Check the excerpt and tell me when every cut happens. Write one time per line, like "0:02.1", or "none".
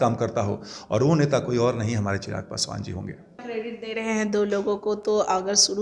0:03.4